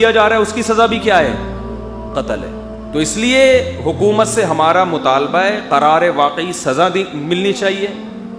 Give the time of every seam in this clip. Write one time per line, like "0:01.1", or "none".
0:02.8